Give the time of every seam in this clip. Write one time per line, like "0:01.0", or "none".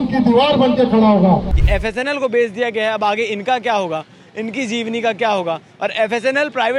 0:01.5